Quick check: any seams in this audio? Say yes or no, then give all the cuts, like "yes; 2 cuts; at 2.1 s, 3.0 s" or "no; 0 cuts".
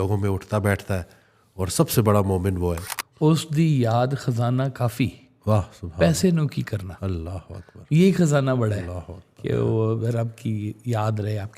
yes; 1 cut; at 2.9 s